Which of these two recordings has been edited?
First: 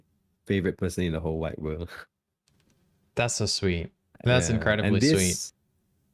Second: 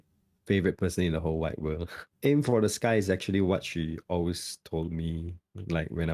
second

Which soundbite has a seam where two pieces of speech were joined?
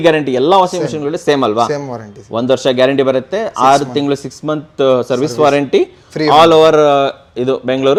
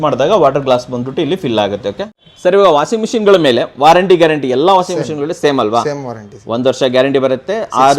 second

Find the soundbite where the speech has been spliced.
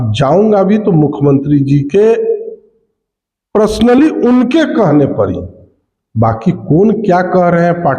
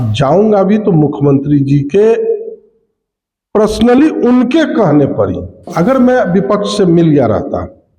second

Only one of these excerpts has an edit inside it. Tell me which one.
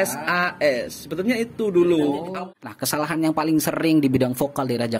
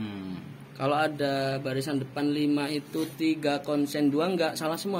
first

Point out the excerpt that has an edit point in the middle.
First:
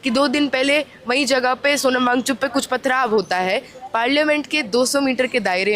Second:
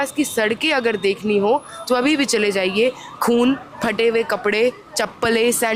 first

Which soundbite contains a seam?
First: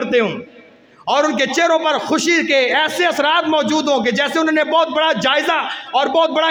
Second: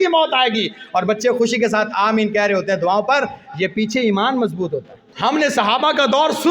second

